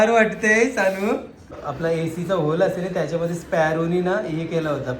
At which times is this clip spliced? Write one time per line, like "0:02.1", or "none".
0:01.6